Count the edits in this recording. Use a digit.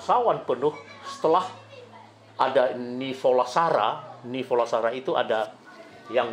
0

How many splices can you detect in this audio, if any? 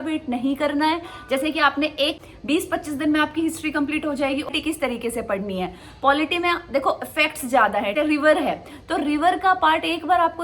3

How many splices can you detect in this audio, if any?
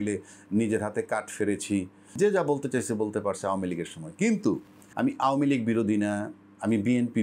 2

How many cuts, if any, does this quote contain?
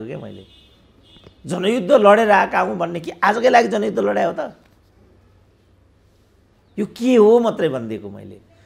0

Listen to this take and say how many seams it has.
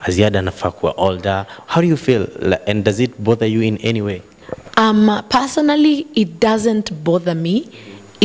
0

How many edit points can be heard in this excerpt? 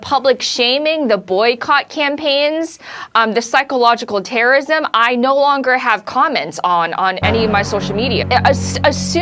1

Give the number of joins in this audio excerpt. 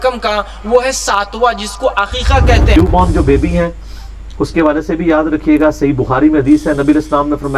1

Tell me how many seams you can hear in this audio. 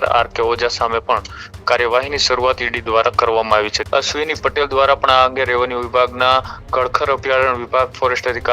1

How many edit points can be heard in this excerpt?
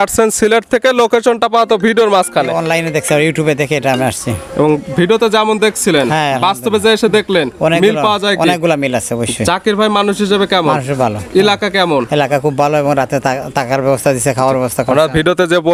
0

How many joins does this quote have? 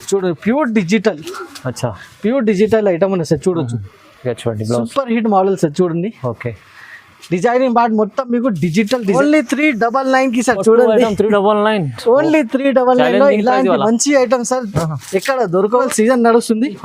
2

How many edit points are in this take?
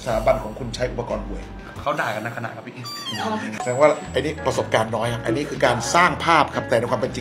2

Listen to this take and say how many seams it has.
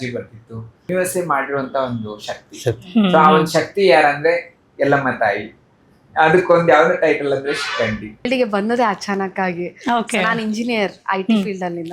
2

